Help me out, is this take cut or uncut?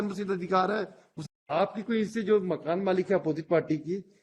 cut